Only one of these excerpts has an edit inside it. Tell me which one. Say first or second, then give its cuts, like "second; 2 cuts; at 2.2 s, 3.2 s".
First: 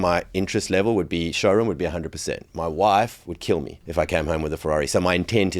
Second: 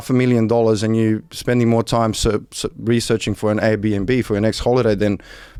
first; 1 cut; at 3.8 s